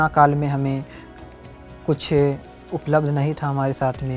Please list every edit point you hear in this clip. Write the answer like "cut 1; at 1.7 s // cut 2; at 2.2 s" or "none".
none